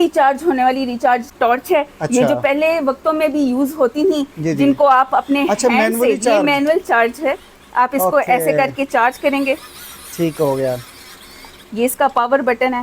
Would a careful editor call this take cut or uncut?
cut